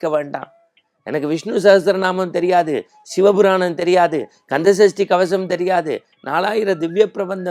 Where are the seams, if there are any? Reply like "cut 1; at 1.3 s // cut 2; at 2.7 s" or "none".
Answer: none